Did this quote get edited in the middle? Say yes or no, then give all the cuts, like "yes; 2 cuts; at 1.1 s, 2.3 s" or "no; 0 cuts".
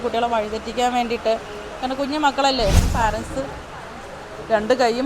yes; 1 cut; at 2.8 s